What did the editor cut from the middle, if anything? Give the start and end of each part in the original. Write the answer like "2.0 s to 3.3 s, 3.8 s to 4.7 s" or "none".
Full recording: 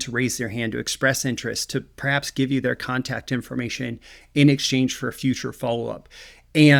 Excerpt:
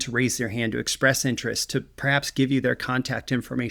none